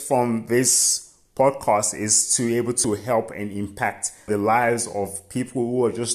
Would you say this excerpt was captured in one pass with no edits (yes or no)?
no